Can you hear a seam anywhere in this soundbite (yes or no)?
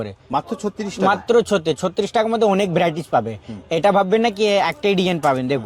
no